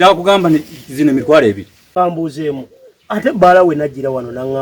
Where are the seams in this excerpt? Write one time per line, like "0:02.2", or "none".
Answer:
0:01.7